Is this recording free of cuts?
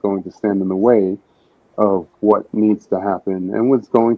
yes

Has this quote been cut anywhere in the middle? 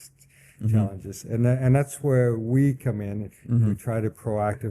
no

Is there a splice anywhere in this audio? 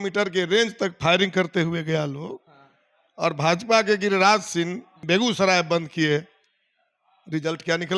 yes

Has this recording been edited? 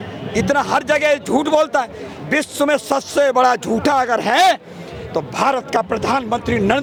no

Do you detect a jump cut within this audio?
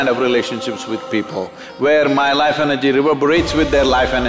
no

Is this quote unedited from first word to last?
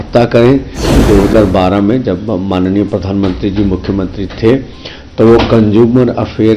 no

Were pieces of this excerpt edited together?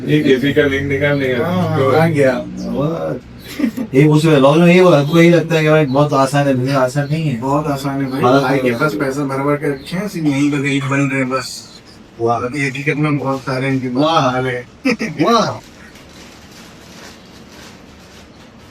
no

